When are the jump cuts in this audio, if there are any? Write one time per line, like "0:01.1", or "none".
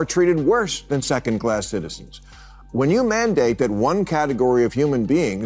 none